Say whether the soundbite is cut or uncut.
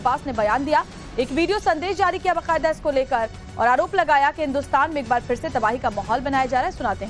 cut